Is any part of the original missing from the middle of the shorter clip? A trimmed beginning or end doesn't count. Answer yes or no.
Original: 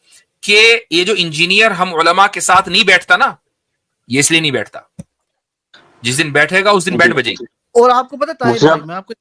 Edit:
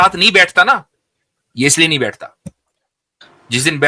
no